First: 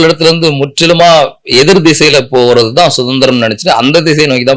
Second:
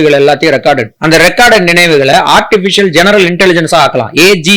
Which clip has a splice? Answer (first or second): second